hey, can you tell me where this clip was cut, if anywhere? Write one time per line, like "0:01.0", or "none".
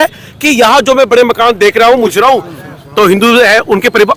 0:02.1

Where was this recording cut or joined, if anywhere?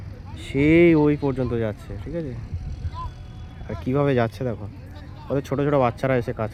none

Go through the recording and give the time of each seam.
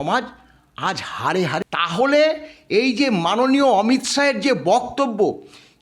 0:01.6

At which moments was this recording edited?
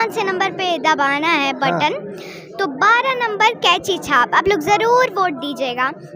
none

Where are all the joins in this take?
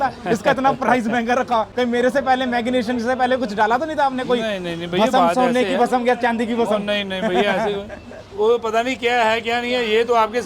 none

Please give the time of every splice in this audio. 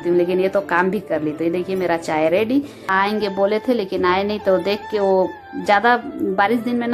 0:02.9

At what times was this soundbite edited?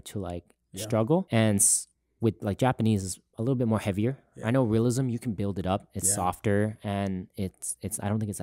0:01.3

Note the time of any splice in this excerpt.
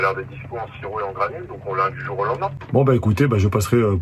0:02.6

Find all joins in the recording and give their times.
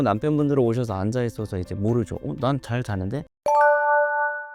0:03.3

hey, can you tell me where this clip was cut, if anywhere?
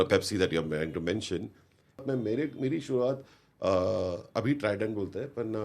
0:02.0

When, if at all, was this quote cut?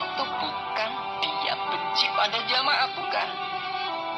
none

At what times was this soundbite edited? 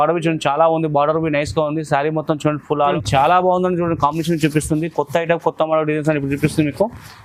0:02.9

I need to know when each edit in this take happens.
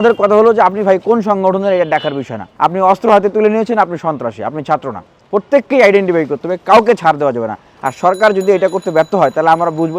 0:05.0

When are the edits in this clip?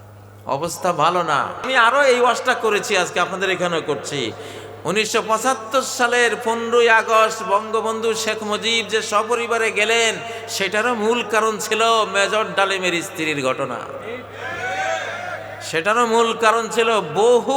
0:01.7

